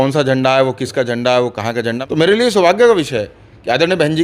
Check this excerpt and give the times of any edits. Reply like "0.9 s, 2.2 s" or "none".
2.0 s